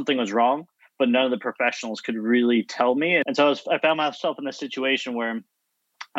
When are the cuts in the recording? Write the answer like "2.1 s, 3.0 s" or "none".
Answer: 3.2 s